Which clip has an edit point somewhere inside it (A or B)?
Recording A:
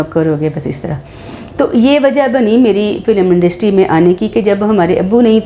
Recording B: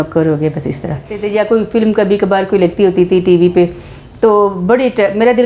B